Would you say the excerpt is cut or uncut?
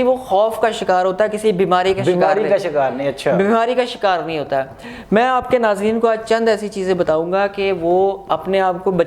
uncut